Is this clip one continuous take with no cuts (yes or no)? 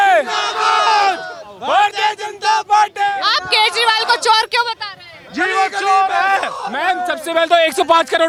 yes